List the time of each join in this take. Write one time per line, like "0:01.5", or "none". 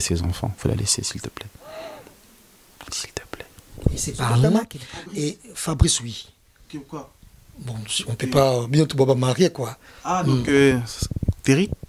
0:04.5